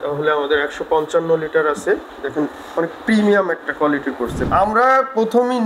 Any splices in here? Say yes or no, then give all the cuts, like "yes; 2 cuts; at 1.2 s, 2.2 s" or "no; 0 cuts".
yes; 1 cut; at 4.4 s